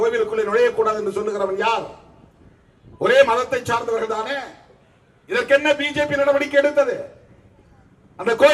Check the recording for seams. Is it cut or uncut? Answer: uncut